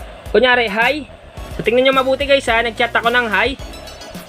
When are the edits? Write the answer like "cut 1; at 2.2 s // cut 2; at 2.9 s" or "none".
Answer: none